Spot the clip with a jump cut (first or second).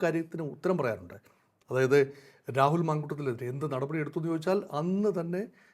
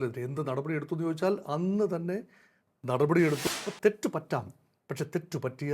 second